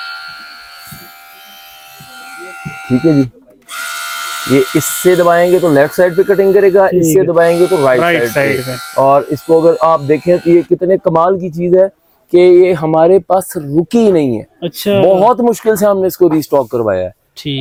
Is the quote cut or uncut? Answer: uncut